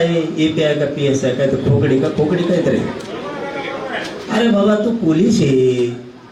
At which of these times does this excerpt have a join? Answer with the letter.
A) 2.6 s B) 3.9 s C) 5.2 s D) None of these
D